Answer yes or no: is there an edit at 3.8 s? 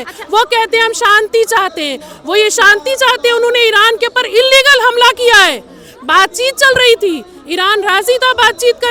no